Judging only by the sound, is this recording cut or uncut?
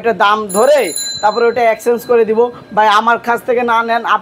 uncut